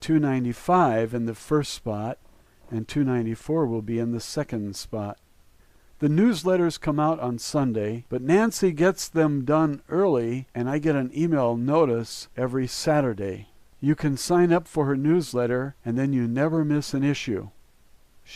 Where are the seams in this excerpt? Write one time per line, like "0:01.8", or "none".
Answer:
0:04.6

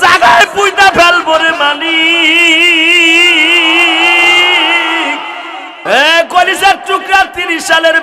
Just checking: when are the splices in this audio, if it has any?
0:05.8

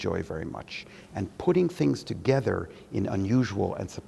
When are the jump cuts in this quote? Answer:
none

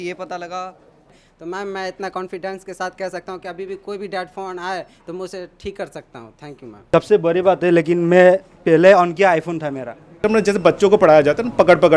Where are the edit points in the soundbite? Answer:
0:01.0
0:06.7
0:10.1

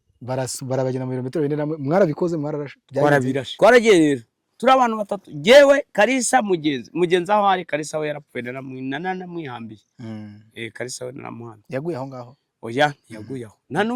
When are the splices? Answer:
0:03.5

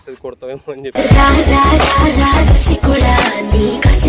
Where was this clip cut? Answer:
none

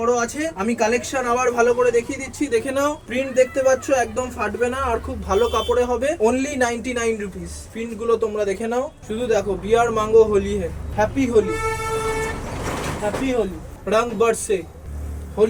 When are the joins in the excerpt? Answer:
none

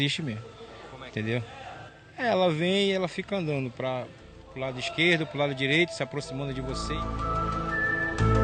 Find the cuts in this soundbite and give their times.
none

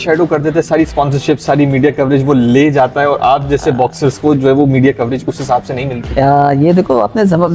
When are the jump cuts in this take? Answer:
none

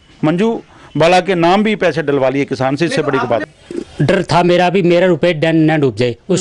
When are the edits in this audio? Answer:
0:03.5

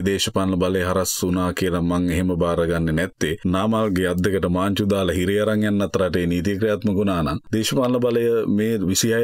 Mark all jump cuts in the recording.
0:03.4
0:07.4

